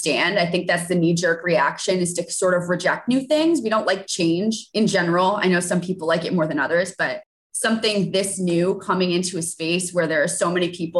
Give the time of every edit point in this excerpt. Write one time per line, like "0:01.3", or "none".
0:04.6